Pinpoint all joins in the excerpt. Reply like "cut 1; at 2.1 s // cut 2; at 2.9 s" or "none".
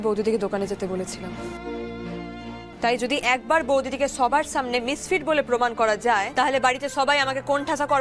cut 1; at 2.7 s // cut 2; at 6.3 s